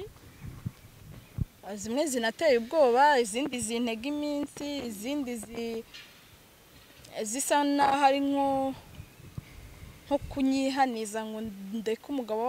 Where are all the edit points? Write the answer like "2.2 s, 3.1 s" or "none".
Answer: none

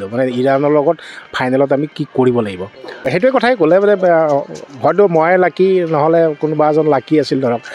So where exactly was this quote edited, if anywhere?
3.0 s

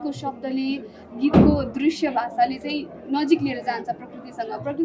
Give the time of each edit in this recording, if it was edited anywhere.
none

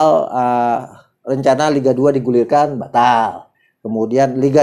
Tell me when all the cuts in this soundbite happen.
none

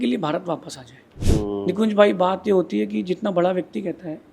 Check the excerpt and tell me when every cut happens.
1.2 s

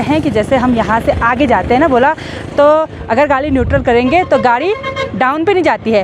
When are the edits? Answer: none

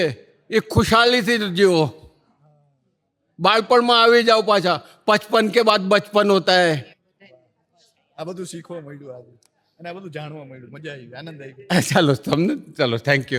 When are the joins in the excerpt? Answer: none

